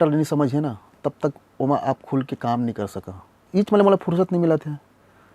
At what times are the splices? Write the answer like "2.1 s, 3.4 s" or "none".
3.4 s

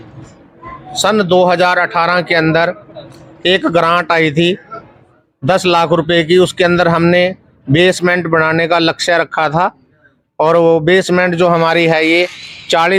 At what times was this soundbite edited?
none

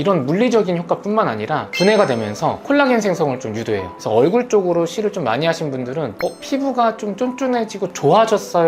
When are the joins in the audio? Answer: none

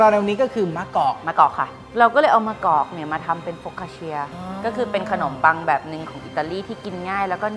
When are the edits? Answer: 1.7 s, 4.4 s

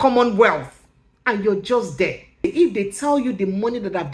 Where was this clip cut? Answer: 2.4 s

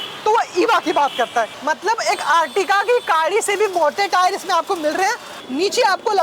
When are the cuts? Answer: 1.6 s, 5.3 s

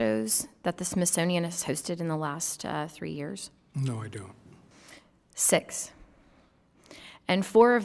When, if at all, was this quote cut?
none

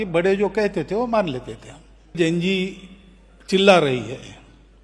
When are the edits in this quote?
2.1 s

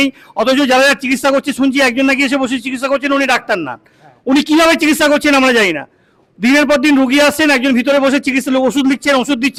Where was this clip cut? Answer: none

